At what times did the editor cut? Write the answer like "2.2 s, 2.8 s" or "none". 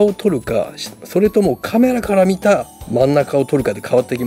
2.8 s